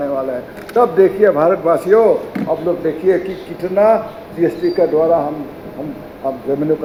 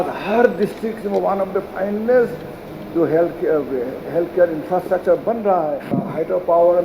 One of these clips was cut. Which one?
second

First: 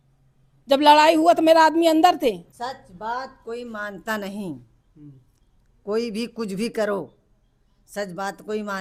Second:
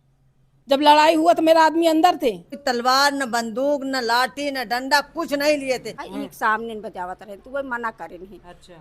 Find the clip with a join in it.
second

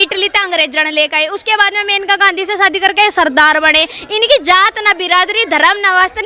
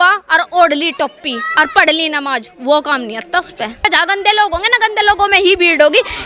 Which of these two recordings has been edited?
second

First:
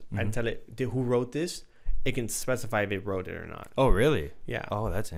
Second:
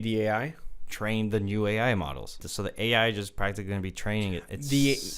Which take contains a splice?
second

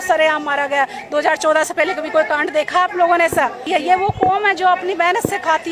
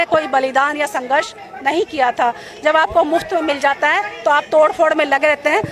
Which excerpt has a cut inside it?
first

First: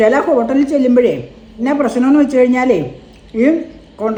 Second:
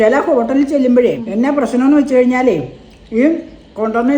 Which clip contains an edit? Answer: second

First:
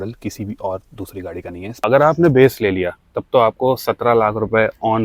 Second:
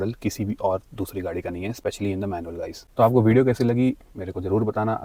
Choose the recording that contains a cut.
first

